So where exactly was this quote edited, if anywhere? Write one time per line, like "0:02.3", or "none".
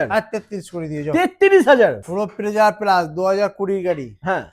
0:02.0